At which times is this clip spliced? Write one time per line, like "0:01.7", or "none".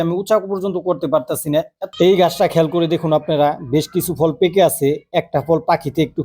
0:01.8